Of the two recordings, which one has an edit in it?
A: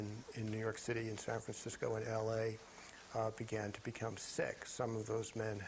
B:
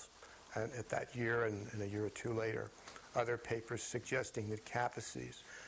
B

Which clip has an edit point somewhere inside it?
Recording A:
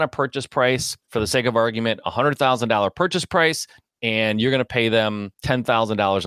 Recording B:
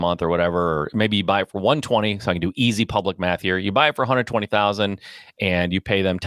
A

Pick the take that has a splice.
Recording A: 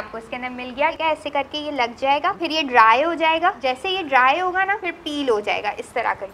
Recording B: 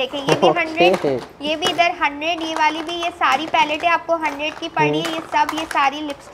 A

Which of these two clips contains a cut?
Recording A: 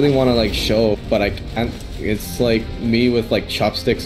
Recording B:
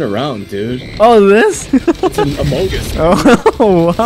B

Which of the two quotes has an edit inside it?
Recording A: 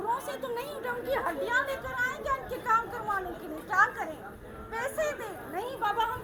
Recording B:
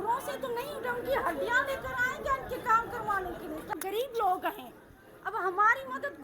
B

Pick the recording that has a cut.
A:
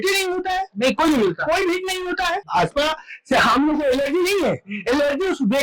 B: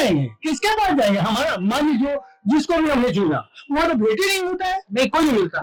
A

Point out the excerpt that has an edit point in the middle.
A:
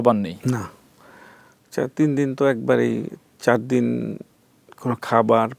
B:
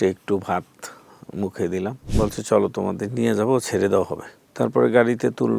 B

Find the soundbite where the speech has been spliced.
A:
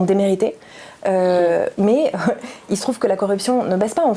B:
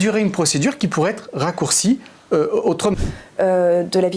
B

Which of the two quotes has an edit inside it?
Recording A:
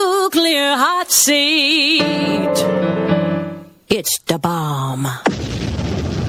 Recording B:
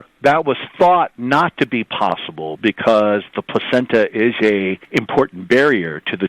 B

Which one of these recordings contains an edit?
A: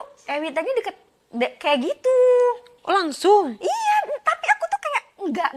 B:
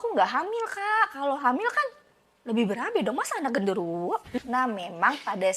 B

